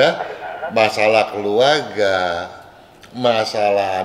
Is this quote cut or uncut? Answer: uncut